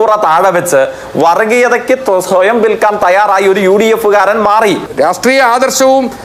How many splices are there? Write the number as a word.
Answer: one